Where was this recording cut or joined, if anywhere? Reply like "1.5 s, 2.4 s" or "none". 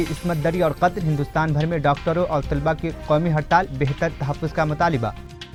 none